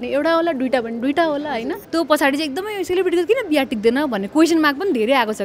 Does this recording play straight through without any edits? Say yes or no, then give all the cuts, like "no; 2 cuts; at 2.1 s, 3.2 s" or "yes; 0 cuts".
no; 1 cut; at 1.8 s